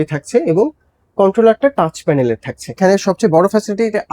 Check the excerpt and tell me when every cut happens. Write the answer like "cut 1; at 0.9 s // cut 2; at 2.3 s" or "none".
cut 1; at 2.8 s